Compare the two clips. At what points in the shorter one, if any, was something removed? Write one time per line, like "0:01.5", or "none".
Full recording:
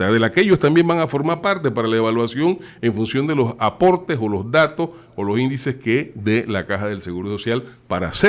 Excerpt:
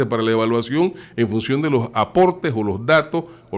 none